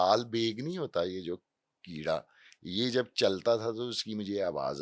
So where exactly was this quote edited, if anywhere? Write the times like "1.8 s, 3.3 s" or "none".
none